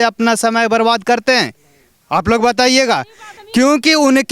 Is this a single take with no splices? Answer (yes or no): yes